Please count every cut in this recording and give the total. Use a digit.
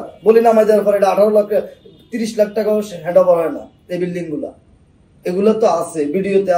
0